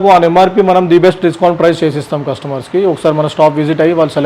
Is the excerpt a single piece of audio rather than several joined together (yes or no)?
yes